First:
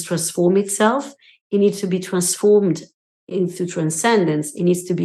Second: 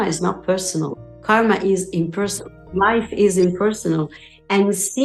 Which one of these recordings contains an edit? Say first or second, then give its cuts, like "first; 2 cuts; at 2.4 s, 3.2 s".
second; 1 cut; at 1.3 s